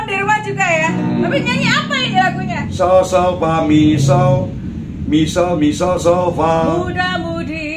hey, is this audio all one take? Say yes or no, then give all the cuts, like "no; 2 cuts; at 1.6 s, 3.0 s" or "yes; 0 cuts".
no; 1 cut; at 2.6 s